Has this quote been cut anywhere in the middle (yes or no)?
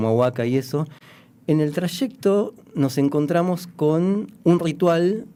no